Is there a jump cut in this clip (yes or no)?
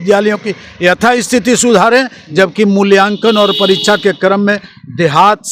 no